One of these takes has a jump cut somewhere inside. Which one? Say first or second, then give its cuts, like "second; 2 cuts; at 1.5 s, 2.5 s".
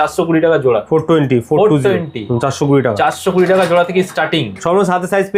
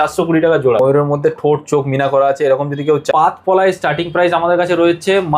second; 2 cuts; at 0.8 s, 3.1 s